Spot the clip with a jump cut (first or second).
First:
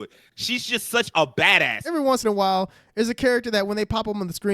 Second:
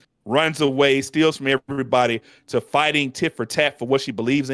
first